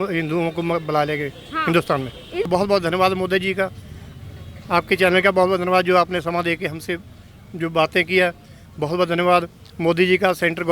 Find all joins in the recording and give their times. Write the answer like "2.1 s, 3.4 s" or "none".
2.5 s